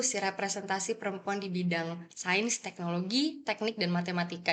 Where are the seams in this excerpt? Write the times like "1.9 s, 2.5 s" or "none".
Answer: none